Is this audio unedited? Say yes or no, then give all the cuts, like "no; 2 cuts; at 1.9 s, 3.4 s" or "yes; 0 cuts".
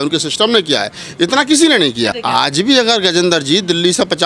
no; 1 cut; at 2.2 s